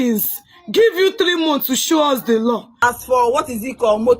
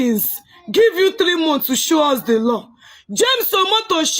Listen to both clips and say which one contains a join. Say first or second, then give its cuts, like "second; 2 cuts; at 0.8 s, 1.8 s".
first; 1 cut; at 2.7 s